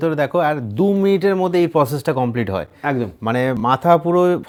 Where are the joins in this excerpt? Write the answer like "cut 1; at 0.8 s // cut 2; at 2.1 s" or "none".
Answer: none